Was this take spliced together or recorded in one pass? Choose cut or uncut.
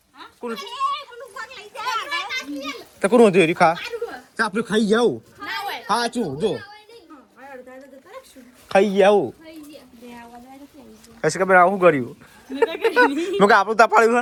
uncut